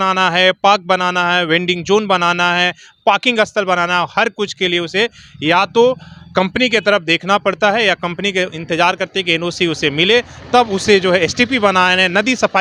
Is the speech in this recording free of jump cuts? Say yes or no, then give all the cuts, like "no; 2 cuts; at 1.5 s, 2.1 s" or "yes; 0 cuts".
yes; 0 cuts